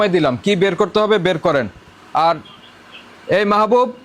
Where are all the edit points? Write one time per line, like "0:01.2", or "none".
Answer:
none